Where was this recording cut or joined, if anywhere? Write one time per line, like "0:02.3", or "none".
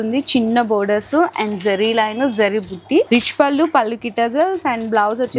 none